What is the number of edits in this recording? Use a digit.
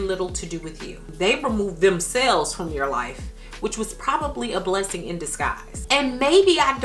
2